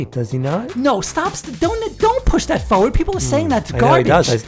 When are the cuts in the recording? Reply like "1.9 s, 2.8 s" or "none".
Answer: none